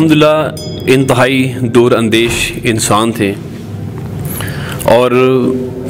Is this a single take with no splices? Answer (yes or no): yes